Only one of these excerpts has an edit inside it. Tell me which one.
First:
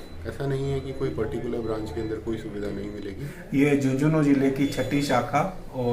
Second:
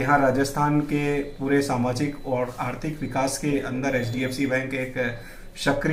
first; 1 cut; at 3.2 s

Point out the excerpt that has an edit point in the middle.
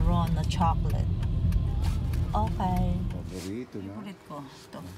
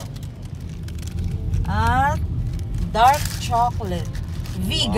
first; 2 cuts; at 3.2 s, 4.0 s

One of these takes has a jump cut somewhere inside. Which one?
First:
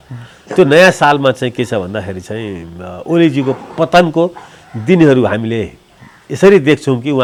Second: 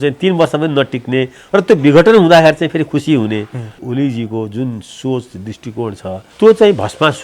second; 2 cuts; at 3.8 s, 6.3 s

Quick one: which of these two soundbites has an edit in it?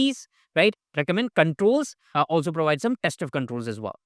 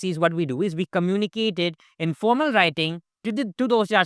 first; 2 cuts; at 0.9 s, 2.0 s

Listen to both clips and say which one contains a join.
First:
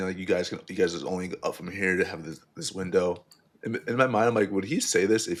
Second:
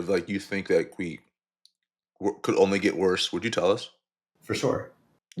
second; 1 cut; at 4.3 s

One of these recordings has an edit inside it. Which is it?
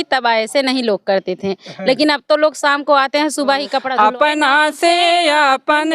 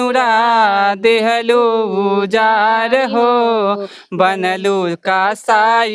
first; 1 cut; at 3.8 s

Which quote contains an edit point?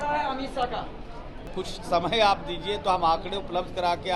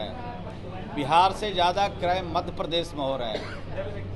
first; 1 cut; at 1.5 s

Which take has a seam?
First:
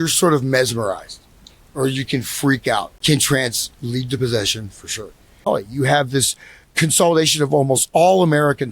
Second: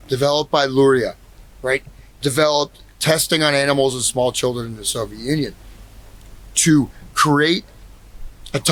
first; 2 cuts; at 2.9 s, 5.5 s

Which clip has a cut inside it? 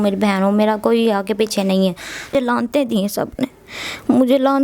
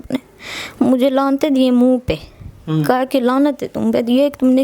first; 1 cut; at 2.3 s

